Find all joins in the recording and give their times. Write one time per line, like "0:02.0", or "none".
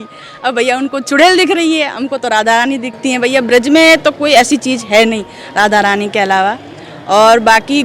none